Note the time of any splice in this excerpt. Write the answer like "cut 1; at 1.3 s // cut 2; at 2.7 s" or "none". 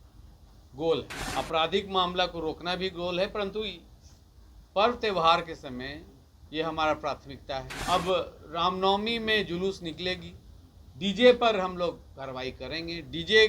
cut 1; at 1.2 s // cut 2; at 7.7 s